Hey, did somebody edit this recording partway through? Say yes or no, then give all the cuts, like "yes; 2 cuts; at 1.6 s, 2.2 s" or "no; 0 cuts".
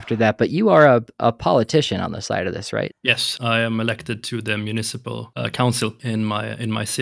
yes; 3 cuts; at 3.0 s, 5.3 s, 6.0 s